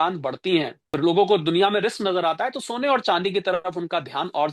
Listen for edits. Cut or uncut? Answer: cut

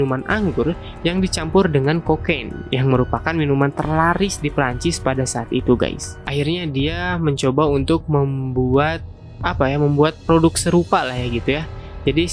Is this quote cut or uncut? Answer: cut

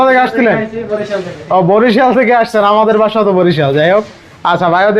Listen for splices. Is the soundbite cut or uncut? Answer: uncut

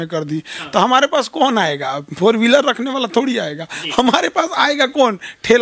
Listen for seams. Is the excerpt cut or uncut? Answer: uncut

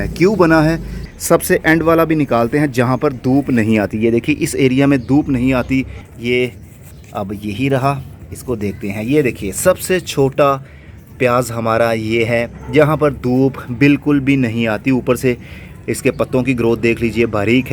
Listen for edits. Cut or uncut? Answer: cut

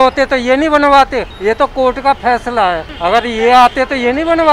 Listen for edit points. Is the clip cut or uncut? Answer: cut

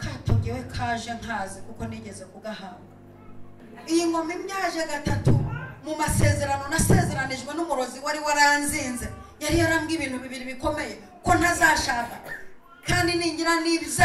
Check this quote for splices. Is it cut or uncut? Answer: cut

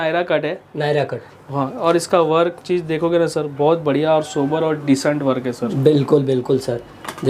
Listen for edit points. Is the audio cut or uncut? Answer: uncut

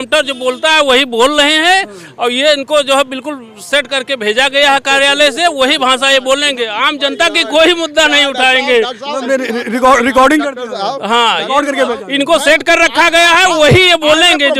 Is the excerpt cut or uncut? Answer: uncut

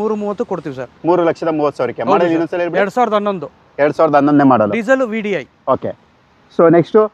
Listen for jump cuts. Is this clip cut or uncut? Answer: uncut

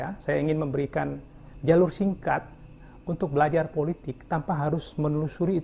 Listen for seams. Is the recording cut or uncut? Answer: uncut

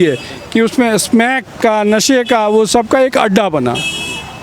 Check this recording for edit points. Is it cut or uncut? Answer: uncut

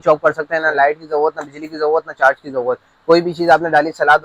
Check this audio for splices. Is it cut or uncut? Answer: uncut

